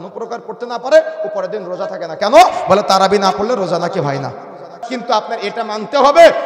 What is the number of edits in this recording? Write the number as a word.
one